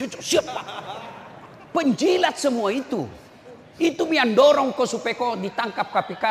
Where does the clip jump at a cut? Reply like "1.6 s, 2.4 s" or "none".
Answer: none